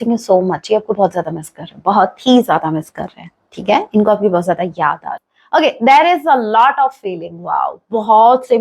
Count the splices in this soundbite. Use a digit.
1